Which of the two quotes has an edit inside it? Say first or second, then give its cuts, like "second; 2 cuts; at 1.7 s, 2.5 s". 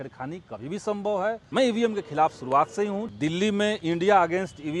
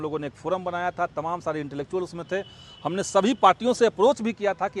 first; 2 cuts; at 1.4 s, 3.1 s